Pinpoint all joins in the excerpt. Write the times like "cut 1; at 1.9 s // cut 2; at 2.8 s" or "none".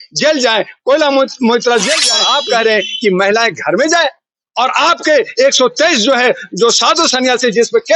cut 1; at 2.1 s